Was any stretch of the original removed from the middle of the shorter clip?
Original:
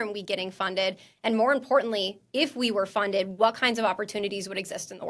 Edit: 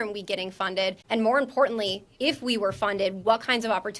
yes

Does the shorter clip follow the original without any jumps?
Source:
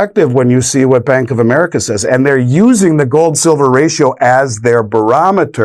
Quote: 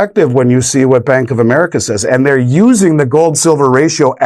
yes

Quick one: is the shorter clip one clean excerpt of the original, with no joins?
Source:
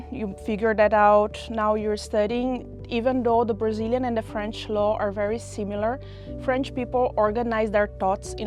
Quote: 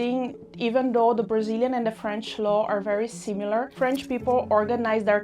no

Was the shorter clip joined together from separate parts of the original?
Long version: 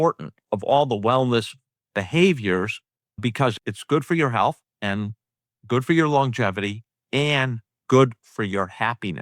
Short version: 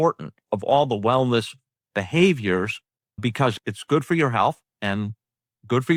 no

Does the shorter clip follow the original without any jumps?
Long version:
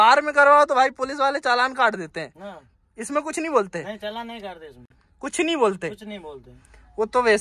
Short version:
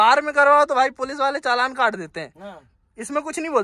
yes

